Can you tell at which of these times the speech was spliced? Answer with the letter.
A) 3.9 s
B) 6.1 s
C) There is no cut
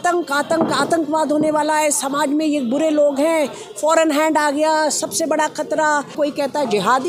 B